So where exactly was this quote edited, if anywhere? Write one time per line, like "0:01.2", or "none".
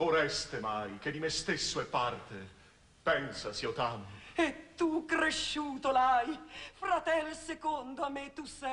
0:04.9